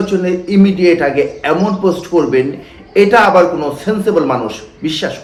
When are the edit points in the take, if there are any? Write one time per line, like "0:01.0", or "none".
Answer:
none